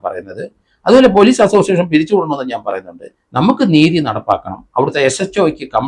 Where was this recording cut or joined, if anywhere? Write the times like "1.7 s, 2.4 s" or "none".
none